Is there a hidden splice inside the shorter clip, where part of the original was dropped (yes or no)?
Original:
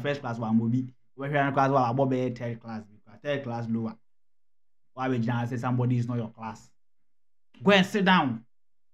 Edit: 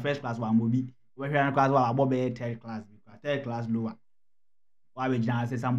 no